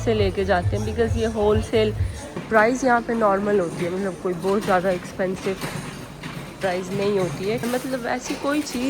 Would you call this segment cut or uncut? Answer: cut